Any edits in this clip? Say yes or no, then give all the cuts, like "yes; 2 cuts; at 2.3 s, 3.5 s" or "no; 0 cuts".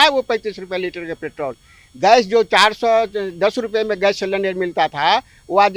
no; 0 cuts